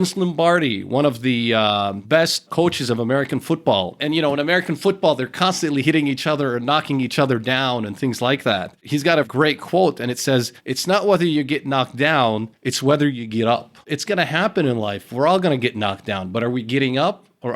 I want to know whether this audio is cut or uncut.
cut